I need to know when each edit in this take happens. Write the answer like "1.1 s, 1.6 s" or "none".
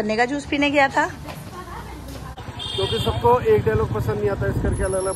2.4 s